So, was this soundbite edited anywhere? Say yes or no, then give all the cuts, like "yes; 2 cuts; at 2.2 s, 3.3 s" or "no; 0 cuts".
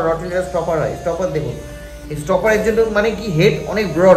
no; 0 cuts